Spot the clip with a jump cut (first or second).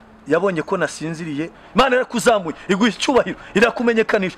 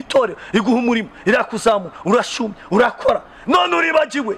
first